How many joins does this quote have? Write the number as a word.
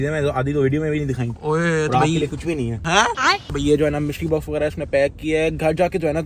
zero